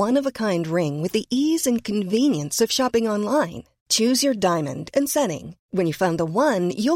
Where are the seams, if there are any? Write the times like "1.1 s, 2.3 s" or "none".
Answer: none